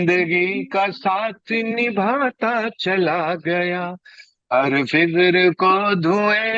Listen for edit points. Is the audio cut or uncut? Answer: uncut